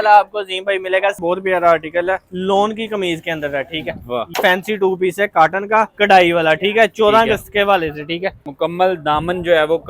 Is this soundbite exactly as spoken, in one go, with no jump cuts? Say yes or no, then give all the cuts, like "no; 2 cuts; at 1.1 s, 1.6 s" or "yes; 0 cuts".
no; 3 cuts; at 1.2 s, 4.3 s, 8.4 s